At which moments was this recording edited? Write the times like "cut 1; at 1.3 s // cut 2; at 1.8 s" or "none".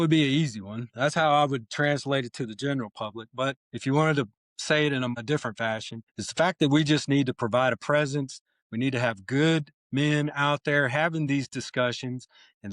cut 1; at 3.7 s // cut 2; at 5.5 s